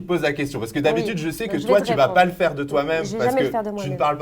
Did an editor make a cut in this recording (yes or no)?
no